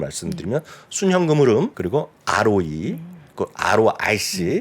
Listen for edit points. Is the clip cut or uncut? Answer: cut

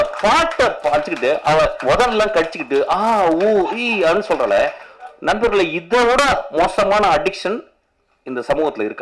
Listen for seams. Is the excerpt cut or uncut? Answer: uncut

